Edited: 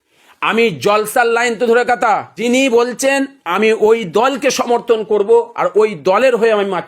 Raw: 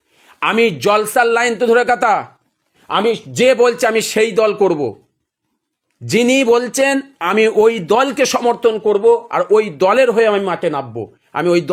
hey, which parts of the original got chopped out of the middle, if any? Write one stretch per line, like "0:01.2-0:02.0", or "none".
0:02.3-0:06.1